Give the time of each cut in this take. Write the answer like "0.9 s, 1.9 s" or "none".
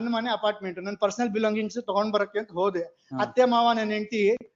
none